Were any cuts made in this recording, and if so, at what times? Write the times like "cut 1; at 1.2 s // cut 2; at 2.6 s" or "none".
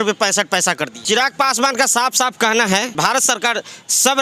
cut 1; at 1.0 s // cut 2; at 2.9 s